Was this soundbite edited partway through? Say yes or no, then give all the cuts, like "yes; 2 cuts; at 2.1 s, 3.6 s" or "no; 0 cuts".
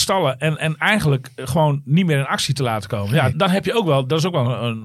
yes; 1 cut; at 3.3 s